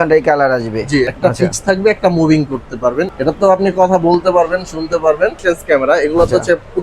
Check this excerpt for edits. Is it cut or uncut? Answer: cut